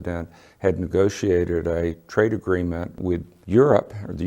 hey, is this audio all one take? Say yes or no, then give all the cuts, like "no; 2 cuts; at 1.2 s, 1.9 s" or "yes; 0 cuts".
no; 1 cut; at 3.0 s